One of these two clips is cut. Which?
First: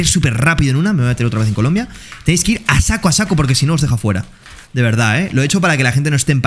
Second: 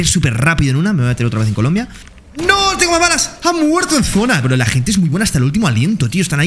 second; 1 cut; at 2.0 s

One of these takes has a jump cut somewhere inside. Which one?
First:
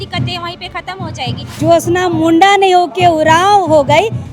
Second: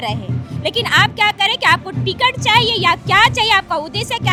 first; 1 cut; at 1.5 s

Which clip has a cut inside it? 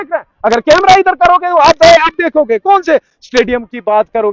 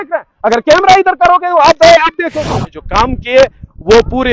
second; 1 cut; at 2.5 s

